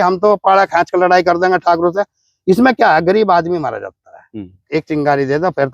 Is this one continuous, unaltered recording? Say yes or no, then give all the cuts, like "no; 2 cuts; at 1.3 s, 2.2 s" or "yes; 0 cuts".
no; 1 cut; at 4.6 s